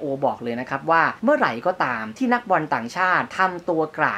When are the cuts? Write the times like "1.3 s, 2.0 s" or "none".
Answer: 1.1 s, 2.0 s, 3.3 s